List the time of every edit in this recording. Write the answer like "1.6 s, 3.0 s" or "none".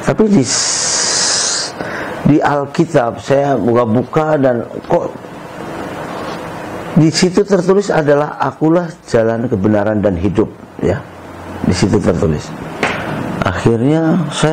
none